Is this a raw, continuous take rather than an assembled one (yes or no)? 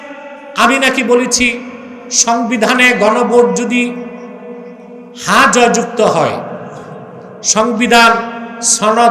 yes